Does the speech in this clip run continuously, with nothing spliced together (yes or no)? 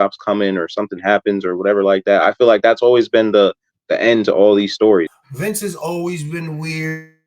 no